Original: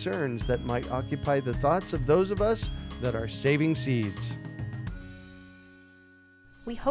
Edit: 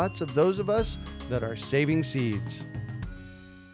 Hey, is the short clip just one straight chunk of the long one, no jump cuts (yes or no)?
no